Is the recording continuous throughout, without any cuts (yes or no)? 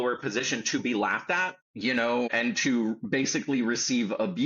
no